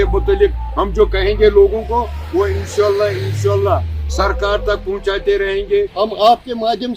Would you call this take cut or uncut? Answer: cut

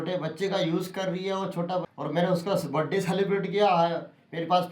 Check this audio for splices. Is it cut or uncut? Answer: cut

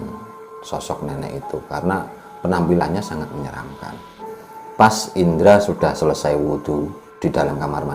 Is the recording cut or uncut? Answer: cut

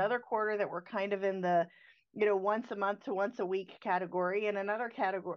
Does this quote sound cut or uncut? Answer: uncut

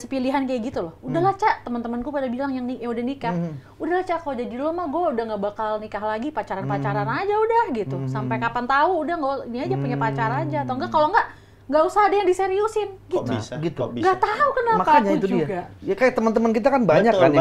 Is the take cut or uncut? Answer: uncut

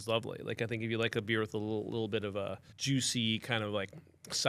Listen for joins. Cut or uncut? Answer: cut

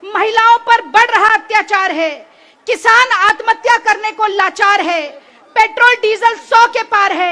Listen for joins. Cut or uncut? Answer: uncut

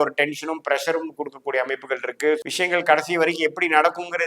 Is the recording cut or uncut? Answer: cut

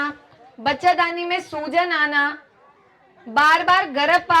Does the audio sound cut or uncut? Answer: uncut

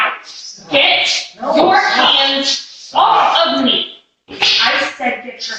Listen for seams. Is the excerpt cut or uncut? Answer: uncut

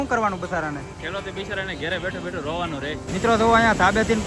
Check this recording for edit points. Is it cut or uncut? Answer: cut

